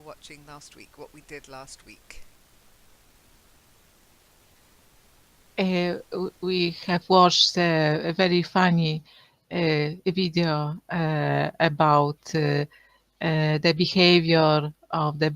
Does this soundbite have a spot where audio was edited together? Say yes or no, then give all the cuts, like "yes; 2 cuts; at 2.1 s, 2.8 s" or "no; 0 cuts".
yes; 1 cut; at 10.4 s